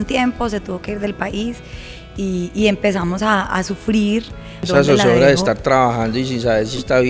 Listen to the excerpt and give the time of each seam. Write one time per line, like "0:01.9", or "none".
0:04.6

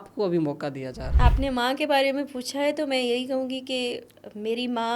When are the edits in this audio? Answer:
0:01.0

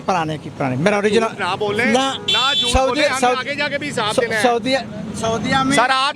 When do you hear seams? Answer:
none

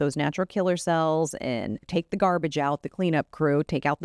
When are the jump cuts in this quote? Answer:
0:01.9

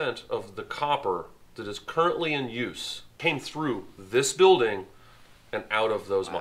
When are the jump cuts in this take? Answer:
0:03.2

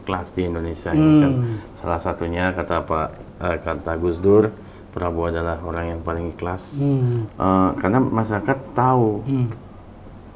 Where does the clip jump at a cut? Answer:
0:07.3

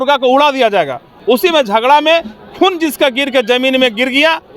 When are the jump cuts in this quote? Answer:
0:01.1

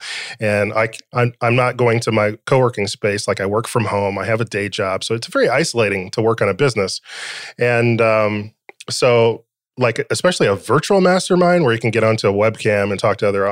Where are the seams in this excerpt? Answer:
none

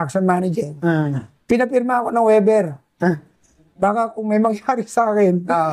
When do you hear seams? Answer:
none

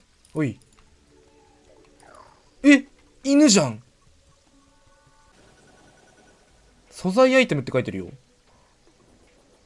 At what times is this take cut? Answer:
0:05.3

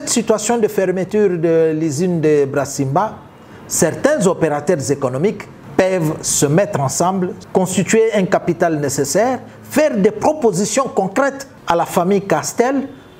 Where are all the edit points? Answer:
0:05.5
0:07.4
0:11.5

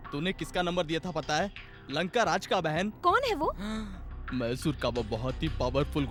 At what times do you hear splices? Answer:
none

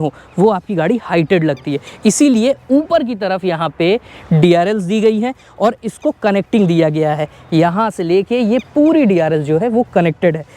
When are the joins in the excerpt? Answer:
none

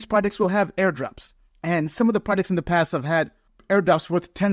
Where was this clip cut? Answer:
none

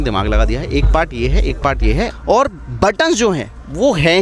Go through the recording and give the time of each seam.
0:02.1

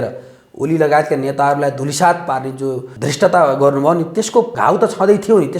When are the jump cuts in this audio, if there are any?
0:02.9
0:04.5

